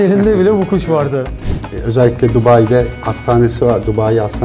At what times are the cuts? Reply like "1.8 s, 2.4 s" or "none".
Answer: 1.7 s